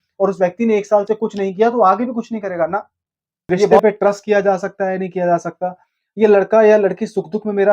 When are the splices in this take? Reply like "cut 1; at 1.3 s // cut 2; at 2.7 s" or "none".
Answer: cut 1; at 3.7 s